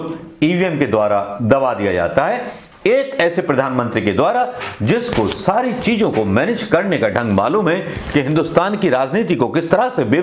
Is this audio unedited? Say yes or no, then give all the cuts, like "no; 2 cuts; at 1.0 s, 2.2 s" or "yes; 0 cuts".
yes; 0 cuts